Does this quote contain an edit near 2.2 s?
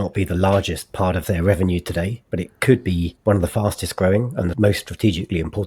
yes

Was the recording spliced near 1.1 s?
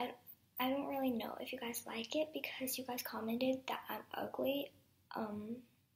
yes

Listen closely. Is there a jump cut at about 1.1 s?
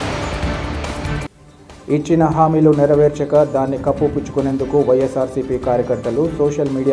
yes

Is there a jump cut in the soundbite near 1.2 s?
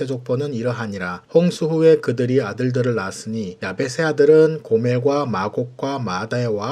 no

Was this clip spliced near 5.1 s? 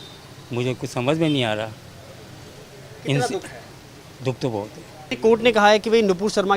yes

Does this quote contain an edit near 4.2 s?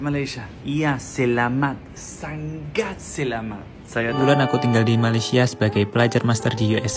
yes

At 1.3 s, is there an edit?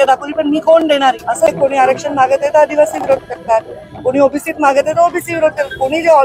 yes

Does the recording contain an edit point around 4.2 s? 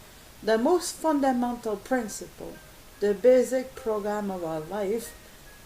yes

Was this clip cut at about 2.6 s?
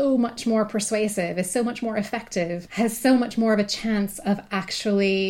yes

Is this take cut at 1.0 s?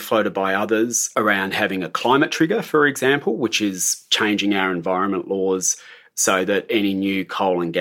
yes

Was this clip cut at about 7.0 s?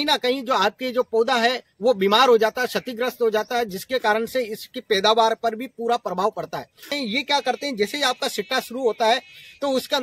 yes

